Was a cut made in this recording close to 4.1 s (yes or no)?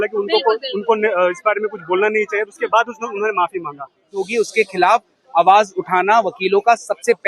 yes